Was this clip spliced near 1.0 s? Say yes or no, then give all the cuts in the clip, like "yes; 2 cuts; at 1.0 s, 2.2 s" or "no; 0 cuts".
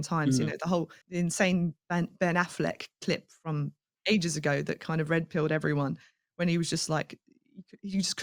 yes; 2 cuts; at 1.0 s, 1.8 s